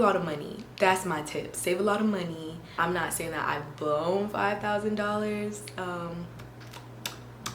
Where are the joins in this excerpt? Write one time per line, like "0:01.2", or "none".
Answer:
0:02.8